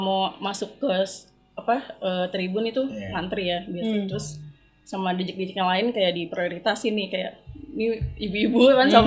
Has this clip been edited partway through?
no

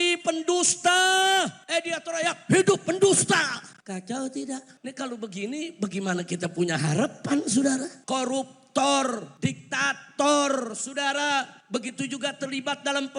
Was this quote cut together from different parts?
yes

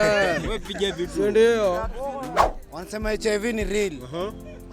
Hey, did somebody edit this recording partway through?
yes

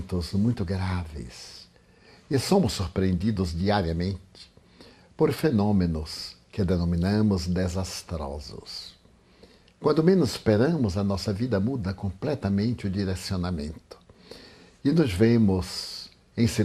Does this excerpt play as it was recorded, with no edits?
no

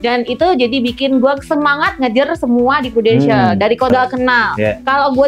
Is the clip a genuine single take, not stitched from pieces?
no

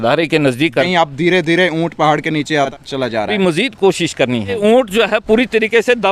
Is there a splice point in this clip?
yes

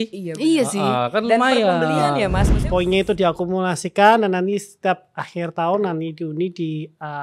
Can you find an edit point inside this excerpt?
yes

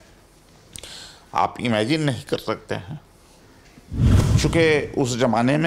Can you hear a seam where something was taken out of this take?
yes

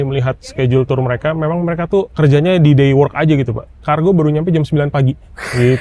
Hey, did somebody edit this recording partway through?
yes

